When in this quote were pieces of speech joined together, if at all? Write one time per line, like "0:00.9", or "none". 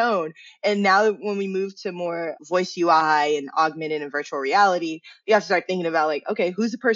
0:02.4